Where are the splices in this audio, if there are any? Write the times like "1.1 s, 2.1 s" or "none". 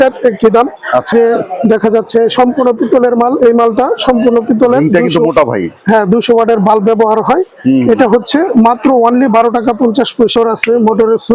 1.1 s, 10.3 s